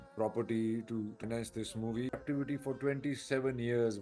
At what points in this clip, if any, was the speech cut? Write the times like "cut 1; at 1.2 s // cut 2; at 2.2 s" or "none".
cut 1; at 1.2 s // cut 2; at 2.2 s